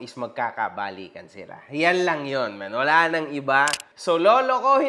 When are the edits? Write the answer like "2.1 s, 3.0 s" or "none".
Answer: none